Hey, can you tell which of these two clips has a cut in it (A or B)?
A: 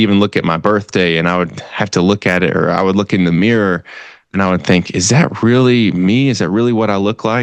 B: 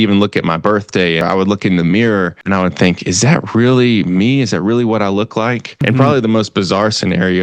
B